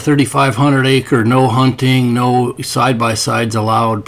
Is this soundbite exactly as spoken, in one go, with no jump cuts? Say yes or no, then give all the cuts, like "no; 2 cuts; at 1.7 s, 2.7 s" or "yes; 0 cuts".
yes; 0 cuts